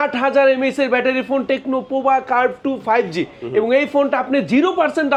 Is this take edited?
no; 0 cuts

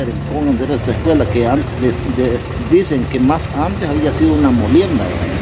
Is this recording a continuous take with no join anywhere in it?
yes; 0 cuts

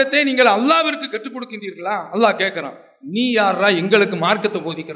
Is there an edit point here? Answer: no; 0 cuts

